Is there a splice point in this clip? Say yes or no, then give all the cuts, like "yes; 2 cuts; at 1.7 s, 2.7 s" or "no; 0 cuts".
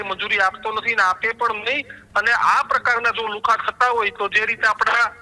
no; 0 cuts